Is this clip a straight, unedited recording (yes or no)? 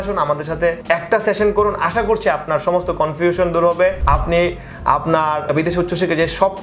yes